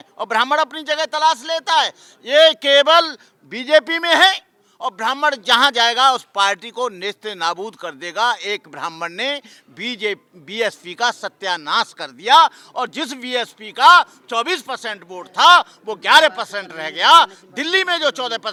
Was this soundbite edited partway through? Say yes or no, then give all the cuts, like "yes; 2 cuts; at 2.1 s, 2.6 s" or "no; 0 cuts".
no; 0 cuts